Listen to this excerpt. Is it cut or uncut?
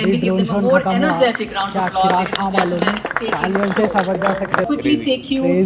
cut